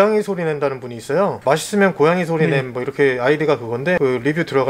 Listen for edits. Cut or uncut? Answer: uncut